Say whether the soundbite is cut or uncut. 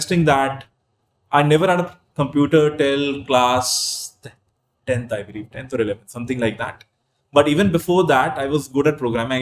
uncut